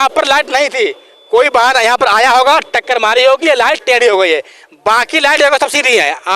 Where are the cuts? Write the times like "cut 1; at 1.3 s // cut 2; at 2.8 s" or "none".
none